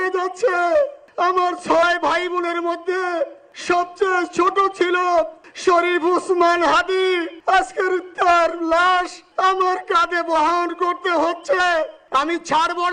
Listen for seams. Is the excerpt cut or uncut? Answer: cut